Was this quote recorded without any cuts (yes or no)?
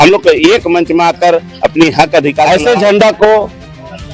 no